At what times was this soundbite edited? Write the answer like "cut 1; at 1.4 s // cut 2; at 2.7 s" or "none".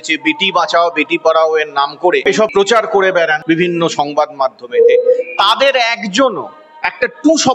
cut 1; at 2.4 s // cut 2; at 3.4 s